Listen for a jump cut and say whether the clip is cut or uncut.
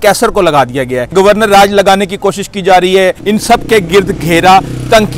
cut